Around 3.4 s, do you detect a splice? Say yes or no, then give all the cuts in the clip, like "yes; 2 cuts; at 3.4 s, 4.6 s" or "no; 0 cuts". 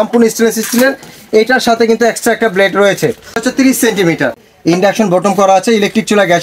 yes; 2 cuts; at 3.4 s, 4.5 s